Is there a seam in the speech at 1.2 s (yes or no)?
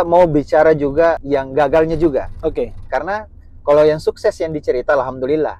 yes